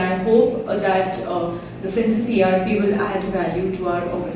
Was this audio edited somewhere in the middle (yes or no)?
no